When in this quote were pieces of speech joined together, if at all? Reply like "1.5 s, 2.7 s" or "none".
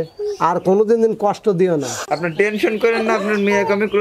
2.0 s